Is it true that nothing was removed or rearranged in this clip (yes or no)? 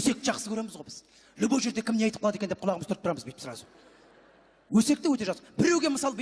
yes